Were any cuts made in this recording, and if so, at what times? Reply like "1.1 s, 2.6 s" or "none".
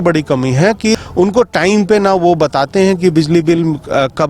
0.9 s